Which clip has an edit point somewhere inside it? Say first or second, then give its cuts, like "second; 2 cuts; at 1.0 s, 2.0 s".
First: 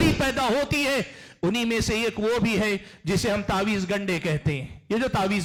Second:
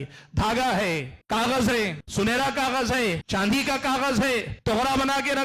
second; 4 cuts; at 1.1 s, 2.0 s, 3.2 s, 4.5 s